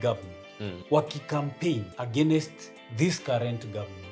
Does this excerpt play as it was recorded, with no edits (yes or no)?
no